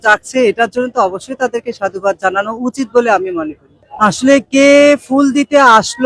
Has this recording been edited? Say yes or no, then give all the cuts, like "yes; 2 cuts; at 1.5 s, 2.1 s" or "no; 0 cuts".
no; 0 cuts